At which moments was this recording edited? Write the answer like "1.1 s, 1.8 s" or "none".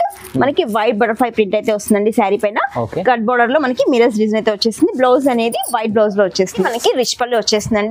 6.7 s